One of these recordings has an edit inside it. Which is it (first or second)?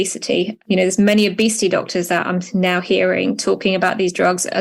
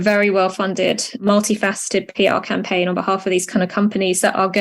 second